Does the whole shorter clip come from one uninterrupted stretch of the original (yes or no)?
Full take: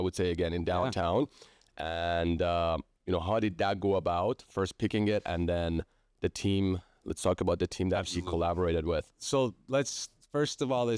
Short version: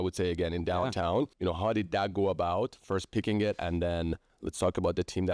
no